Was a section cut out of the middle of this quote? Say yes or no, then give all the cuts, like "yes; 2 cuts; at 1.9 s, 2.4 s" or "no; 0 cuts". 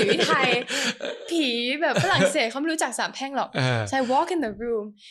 no; 0 cuts